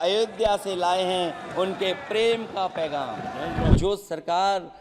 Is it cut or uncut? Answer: cut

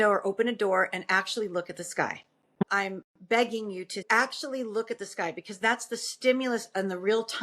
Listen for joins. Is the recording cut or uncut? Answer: cut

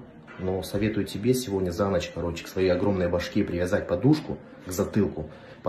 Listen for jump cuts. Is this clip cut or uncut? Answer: uncut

